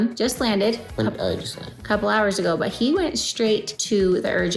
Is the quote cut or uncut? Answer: uncut